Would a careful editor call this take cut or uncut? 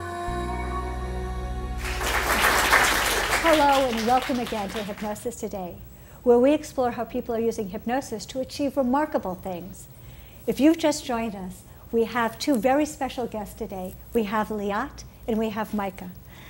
cut